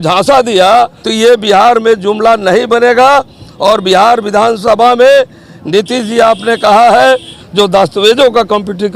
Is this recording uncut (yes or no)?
no